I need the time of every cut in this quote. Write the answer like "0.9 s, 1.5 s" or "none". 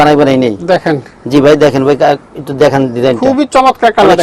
none